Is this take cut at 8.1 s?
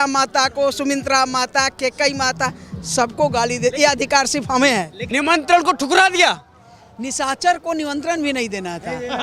no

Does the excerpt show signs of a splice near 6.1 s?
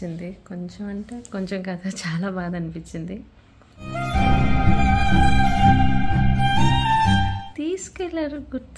no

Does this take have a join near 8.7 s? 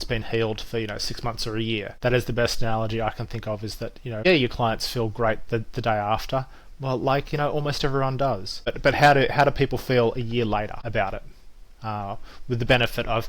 yes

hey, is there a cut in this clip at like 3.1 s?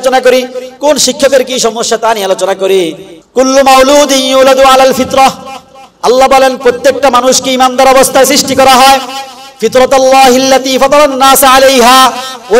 yes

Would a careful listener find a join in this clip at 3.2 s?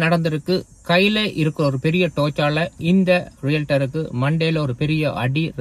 no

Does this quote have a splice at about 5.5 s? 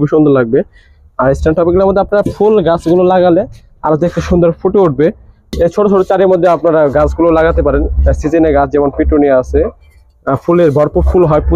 yes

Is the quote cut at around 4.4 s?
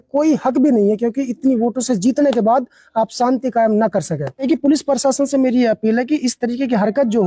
yes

